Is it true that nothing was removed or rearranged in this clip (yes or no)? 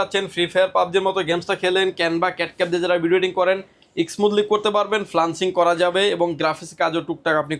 yes